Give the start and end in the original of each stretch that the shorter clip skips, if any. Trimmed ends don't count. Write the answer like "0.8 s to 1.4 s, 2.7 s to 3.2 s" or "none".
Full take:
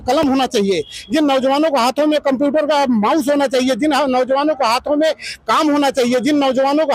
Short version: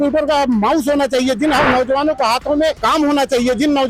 5.2 s to 5.5 s